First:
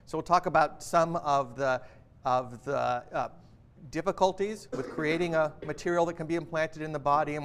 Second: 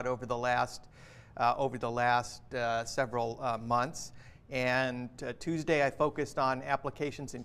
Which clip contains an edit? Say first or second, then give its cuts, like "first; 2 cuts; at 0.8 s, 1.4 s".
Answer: first; 1 cut; at 3.4 s